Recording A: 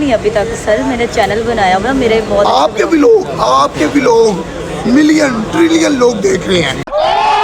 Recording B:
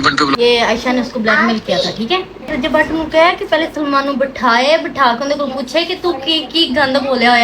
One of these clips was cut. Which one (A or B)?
B